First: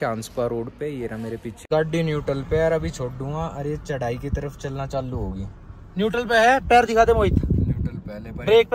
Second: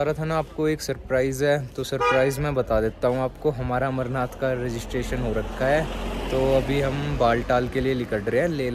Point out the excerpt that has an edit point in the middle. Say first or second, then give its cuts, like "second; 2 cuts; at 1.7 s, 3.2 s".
first; 1 cut; at 1.6 s